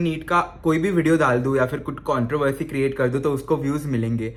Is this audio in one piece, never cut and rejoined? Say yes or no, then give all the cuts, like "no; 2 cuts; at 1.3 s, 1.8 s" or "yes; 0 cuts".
yes; 0 cuts